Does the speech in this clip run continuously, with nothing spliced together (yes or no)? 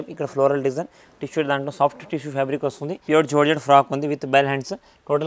no